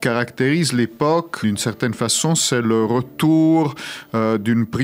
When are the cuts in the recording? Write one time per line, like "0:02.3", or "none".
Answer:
0:01.3